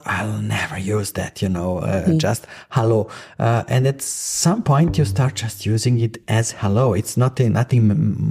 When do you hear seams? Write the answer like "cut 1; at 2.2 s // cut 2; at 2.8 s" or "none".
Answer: none